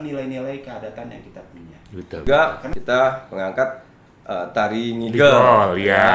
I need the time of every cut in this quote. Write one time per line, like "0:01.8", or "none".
0:02.2